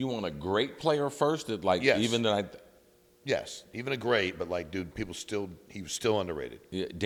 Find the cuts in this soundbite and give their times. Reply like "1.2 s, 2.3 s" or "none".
none